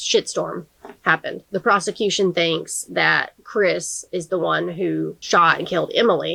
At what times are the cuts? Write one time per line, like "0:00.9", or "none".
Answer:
none